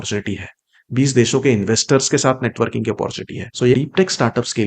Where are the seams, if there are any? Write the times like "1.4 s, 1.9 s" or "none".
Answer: 3.7 s

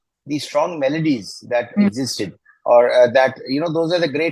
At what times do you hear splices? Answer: none

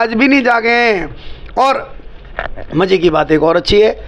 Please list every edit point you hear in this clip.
none

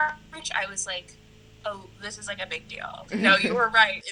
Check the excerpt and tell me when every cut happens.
none

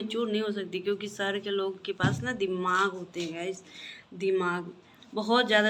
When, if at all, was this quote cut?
none

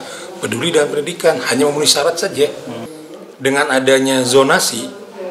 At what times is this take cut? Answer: 2.8 s

